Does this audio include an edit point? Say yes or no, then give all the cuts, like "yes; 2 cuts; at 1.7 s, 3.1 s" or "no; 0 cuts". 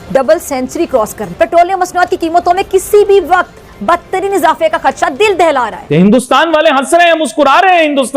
yes; 2 cuts; at 1.2 s, 6.0 s